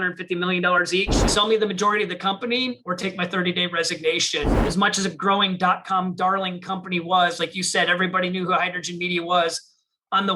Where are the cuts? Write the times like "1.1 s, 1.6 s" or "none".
1.2 s, 4.6 s

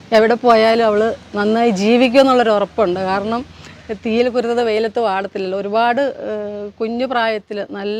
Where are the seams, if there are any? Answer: none

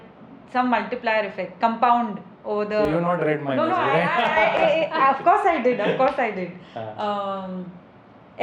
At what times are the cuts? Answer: none

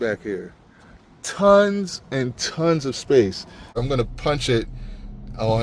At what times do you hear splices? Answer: 3.8 s

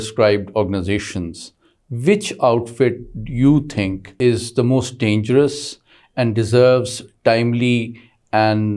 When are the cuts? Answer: 4.1 s

